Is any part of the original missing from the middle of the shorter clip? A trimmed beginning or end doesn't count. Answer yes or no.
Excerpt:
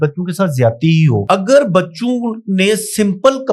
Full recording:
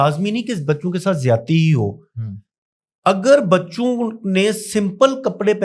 yes